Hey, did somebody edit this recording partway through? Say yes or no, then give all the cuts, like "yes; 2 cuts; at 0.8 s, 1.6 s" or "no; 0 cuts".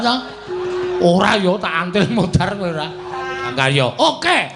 yes; 1 cut; at 3.5 s